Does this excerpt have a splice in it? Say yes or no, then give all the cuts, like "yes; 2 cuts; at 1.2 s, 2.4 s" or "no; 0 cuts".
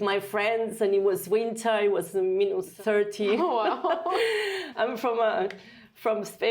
yes; 2 cuts; at 2.7 s, 4.6 s